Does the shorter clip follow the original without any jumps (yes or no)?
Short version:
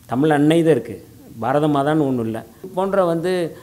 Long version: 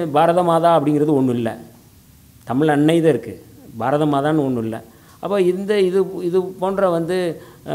no